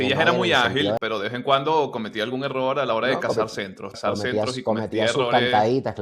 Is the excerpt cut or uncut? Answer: cut